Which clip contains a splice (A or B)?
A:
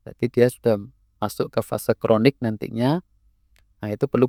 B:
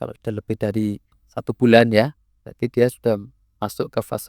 B